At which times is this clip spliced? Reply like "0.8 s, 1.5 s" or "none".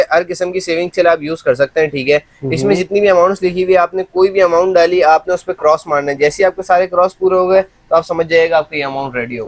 none